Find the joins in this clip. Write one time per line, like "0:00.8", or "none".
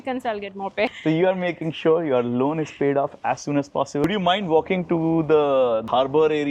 0:01.0
0:04.0